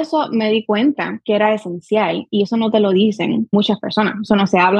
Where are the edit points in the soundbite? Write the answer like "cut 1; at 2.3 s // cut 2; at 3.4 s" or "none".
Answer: none

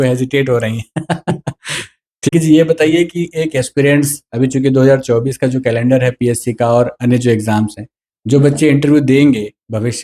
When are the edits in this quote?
cut 1; at 2.3 s

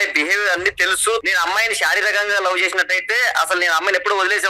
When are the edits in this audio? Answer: cut 1; at 1.2 s

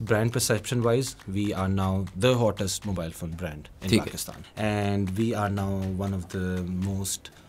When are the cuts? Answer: cut 1; at 4.4 s

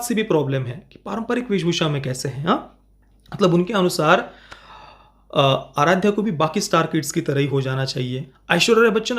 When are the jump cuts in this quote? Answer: cut 1; at 8.3 s

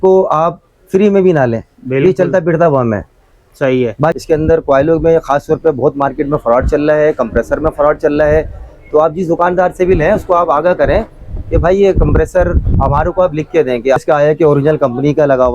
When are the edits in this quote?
cut 1; at 4.2 s // cut 2; at 14.0 s

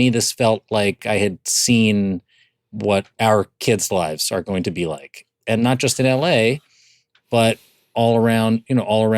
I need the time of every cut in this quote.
cut 1; at 1.0 s

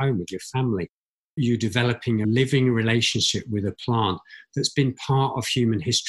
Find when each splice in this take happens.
cut 1; at 1.4 s // cut 2; at 2.2 s

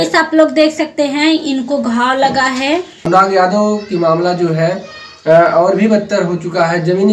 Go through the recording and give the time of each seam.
cut 1; at 3.1 s

